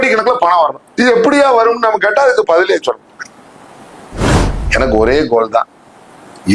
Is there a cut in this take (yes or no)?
yes